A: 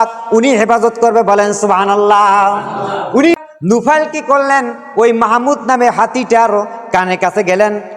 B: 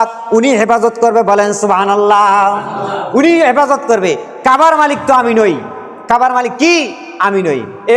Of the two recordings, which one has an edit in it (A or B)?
A